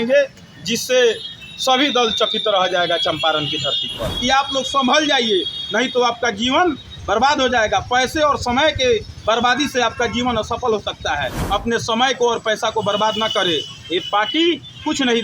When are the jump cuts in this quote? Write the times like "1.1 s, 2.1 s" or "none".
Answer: 4.0 s, 11.4 s

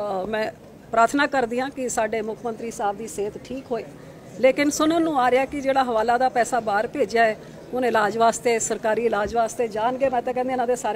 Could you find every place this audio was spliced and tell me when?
none

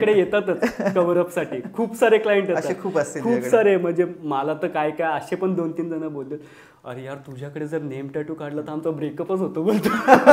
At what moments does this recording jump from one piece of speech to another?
none

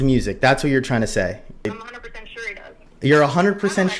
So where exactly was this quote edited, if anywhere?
1.7 s

